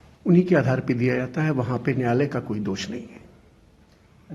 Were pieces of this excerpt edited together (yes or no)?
no